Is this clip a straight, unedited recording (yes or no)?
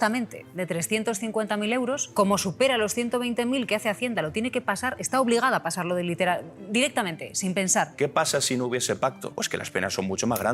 no